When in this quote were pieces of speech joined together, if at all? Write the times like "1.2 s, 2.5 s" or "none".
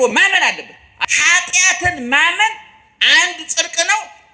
1.0 s